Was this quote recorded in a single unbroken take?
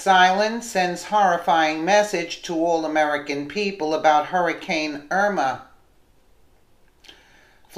yes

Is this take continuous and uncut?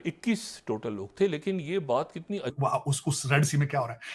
no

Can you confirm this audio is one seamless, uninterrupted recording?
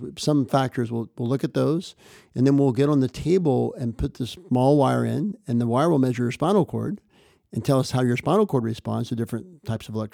yes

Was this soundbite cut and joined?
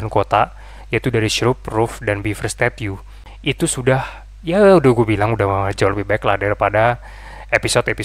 no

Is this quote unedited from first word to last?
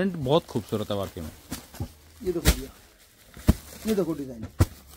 yes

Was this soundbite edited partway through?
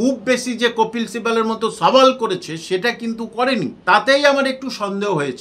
yes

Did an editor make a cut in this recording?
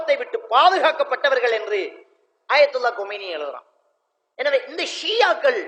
no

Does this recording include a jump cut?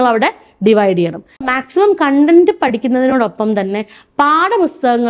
yes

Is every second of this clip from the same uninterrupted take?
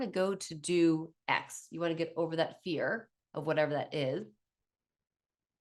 yes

